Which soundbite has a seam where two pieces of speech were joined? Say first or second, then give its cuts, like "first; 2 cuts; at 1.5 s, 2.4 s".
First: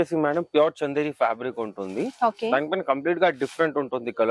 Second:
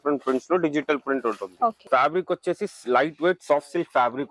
second; 1 cut; at 1.8 s